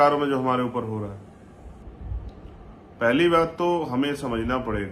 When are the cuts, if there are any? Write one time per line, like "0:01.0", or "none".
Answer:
0:01.8